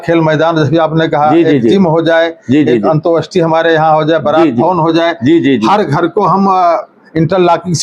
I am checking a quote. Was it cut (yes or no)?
no